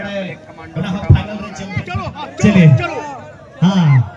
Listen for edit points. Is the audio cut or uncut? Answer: cut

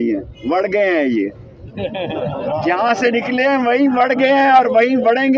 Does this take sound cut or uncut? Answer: uncut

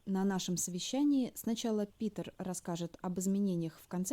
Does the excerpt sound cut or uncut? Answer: uncut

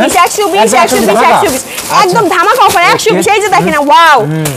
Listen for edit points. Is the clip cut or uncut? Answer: uncut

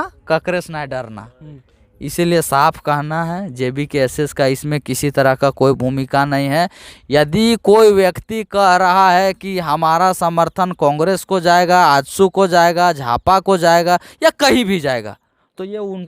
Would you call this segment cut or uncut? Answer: uncut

